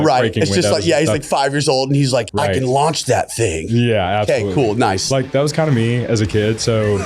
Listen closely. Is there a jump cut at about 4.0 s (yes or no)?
no